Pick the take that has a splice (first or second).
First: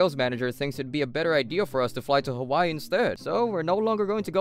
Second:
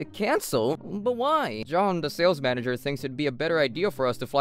first